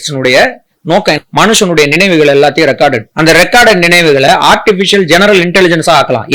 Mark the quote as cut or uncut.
cut